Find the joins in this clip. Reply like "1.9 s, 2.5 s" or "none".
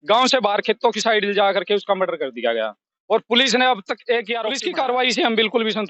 4.5 s